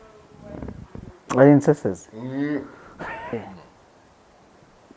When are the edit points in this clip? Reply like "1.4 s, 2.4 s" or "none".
3.4 s